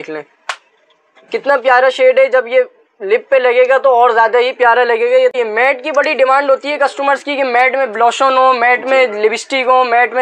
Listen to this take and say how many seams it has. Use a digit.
1